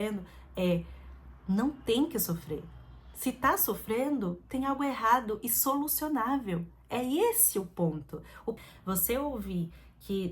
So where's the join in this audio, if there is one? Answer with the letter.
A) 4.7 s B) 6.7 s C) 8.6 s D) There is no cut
C